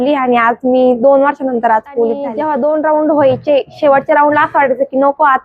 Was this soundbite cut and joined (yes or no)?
yes